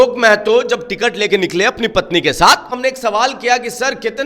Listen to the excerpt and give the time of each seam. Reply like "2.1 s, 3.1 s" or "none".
2.7 s